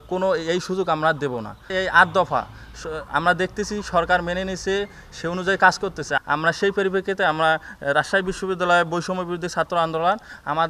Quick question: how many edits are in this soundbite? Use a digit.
2